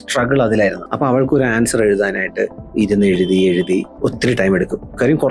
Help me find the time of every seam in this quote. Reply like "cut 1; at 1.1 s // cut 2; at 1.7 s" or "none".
cut 1; at 0.8 s // cut 2; at 2.6 s // cut 3; at 3.9 s